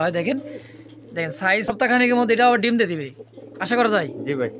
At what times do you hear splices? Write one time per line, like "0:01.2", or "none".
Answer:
0:01.7